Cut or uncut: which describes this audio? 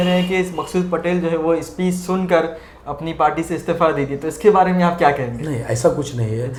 uncut